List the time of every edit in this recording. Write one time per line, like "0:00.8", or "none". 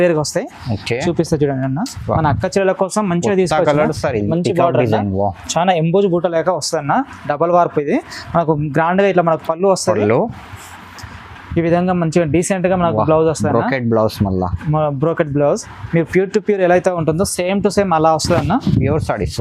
0:04.3